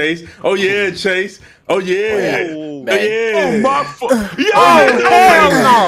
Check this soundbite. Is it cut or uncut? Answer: uncut